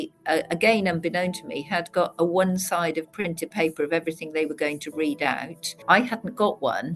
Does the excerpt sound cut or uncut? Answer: cut